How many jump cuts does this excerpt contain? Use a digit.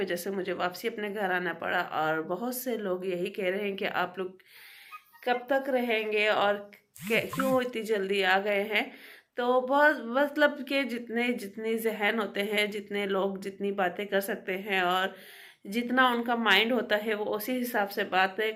0